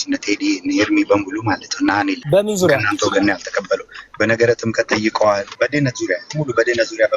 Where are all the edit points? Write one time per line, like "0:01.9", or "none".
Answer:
0:02.2
0:05.5